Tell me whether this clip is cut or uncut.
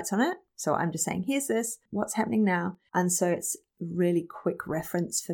cut